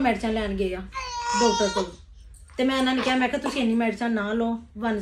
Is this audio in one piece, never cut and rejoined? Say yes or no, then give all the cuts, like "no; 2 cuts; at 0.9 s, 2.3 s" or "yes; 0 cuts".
yes; 0 cuts